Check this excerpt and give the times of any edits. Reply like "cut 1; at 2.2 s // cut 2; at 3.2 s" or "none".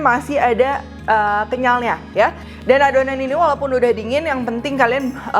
none